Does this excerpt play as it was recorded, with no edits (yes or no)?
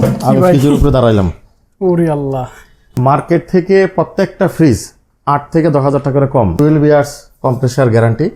no